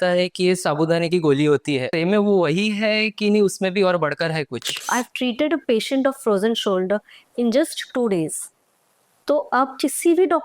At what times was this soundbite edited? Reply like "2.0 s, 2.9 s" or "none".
1.9 s, 4.8 s